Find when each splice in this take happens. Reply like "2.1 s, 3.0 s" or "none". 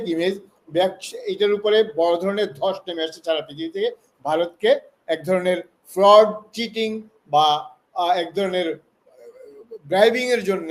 none